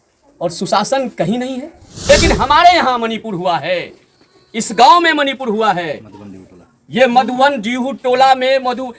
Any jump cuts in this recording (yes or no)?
yes